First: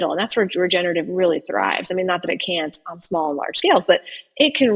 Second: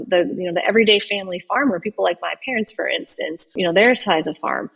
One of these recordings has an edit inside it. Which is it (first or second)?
second